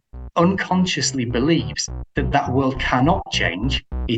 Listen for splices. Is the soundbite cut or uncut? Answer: uncut